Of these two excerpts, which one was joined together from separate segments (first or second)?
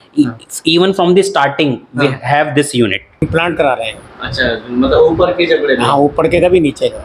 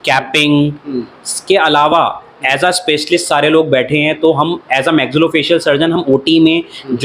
first